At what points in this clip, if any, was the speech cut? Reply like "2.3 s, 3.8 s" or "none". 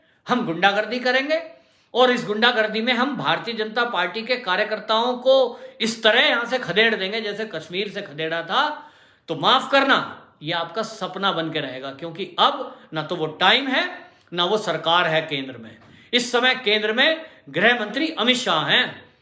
none